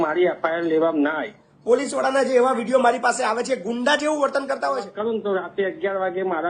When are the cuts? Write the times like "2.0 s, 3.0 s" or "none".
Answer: 1.5 s, 4.9 s